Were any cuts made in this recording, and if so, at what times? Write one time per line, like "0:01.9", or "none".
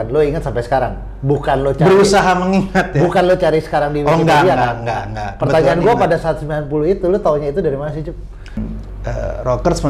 0:08.6